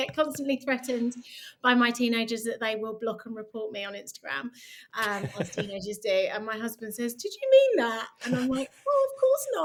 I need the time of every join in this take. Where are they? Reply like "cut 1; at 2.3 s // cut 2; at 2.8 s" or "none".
none